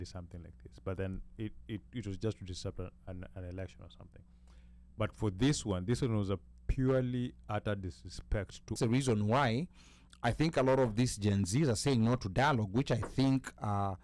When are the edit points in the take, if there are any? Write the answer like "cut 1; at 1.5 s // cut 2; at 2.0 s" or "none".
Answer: cut 1; at 8.8 s